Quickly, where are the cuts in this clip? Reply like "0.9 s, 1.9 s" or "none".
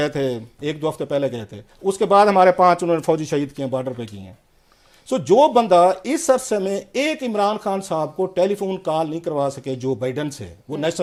none